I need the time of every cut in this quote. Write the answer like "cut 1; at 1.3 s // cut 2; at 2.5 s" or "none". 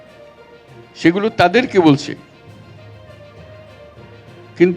cut 1; at 0.9 s